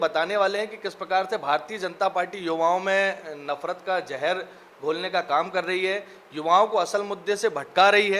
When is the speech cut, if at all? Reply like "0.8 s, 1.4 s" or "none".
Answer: none